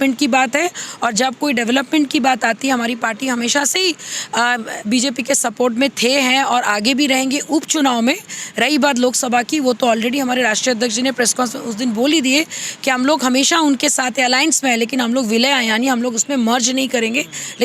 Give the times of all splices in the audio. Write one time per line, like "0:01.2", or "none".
none